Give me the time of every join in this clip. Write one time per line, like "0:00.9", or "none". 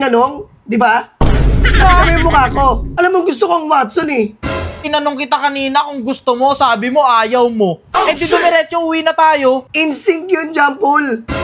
0:02.9
0:04.8
0:09.7